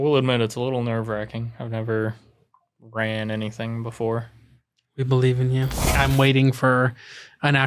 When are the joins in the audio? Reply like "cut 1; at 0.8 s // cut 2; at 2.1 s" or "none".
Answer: cut 1; at 5.9 s